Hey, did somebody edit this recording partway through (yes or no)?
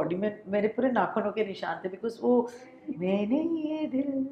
yes